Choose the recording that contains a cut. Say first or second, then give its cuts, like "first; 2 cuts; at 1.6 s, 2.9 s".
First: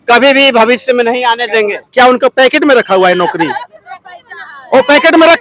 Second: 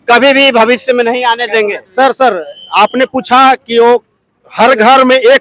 first; 1 cut; at 1.8 s